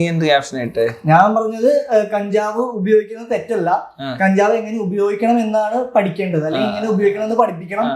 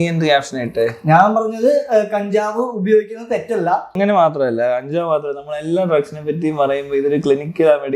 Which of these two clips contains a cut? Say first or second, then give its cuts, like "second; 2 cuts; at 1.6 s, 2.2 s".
second; 1 cut; at 3.9 s